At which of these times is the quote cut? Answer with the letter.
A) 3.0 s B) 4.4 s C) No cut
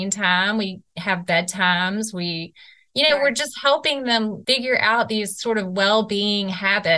B